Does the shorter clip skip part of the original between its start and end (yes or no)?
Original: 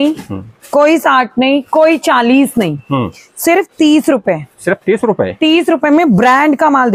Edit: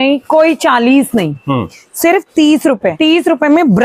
yes